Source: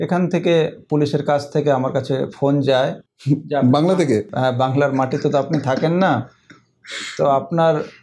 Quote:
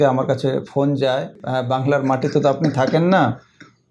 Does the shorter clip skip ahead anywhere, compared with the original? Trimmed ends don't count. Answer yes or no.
yes